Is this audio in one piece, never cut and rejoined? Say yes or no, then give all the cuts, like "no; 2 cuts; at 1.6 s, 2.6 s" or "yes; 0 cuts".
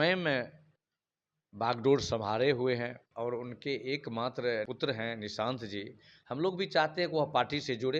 no; 2 cuts; at 3.0 s, 4.7 s